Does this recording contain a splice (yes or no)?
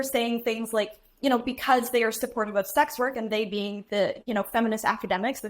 yes